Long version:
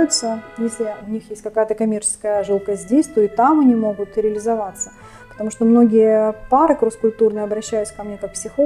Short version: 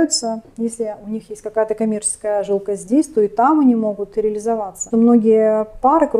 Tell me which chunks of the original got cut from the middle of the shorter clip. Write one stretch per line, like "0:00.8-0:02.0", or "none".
0:04.8-0:05.4